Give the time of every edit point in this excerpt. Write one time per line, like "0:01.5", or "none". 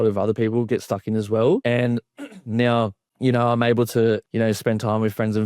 0:01.6
0:03.0
0:04.3